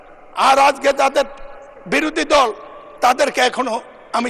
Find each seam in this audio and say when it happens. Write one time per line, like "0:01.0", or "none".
none